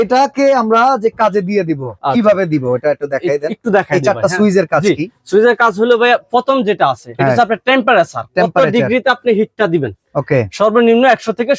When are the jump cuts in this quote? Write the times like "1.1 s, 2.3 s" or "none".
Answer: none

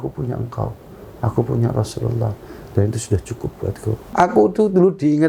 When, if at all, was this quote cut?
4.0 s

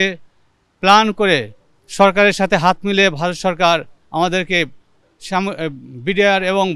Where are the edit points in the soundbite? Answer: none

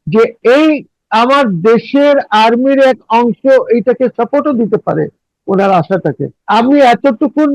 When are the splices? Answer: 6.3 s

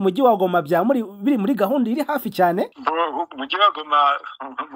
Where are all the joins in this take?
2.7 s

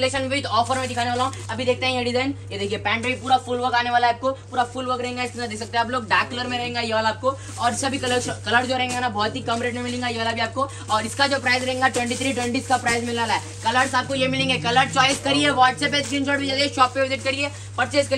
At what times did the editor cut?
none

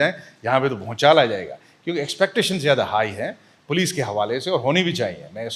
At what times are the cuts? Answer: none

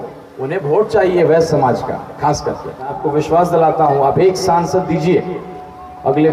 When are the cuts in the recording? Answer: 3.0 s

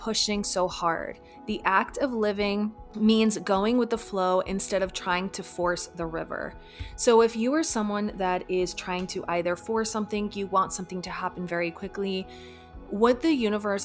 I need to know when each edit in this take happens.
none

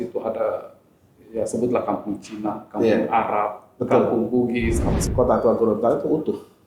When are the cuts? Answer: 5.1 s

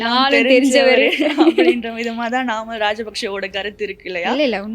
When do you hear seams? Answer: none

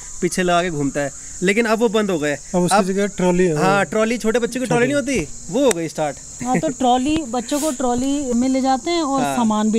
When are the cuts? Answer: none

